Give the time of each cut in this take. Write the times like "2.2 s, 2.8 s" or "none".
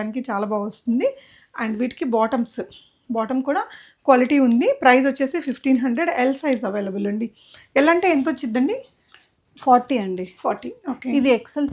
none